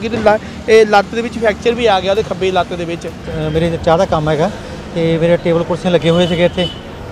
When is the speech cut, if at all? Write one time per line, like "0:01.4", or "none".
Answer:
0:03.3